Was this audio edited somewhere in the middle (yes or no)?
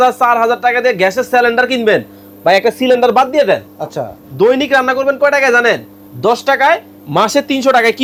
no